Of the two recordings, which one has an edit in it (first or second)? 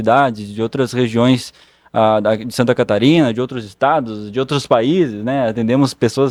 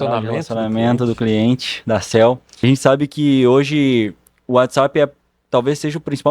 second